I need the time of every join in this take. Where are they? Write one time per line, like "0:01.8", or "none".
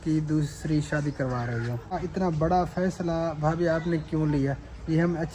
0:02.0